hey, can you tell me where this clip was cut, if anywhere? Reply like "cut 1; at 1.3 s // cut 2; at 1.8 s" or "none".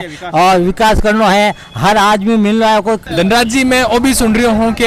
cut 1; at 3.0 s